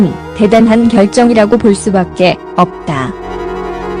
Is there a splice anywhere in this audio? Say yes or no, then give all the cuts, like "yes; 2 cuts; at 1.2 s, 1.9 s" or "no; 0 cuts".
no; 0 cuts